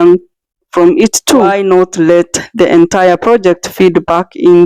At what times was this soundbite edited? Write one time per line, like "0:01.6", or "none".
0:01.5